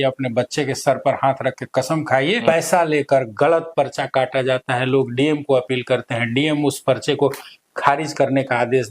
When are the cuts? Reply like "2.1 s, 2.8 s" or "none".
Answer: 2.4 s